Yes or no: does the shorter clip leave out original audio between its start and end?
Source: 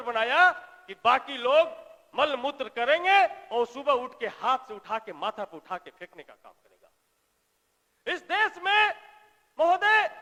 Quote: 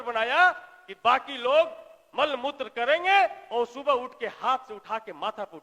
no